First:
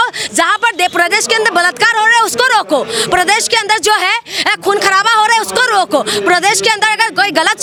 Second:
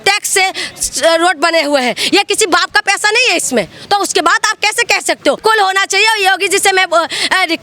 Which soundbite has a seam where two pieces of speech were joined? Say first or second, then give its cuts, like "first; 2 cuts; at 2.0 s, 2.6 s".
second; 1 cut; at 5.4 s